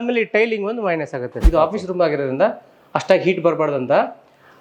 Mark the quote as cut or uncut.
cut